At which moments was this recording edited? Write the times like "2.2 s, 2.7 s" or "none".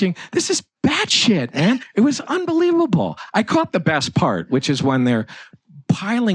1.9 s